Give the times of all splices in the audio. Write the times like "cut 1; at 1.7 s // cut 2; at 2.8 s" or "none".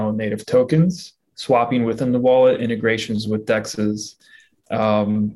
none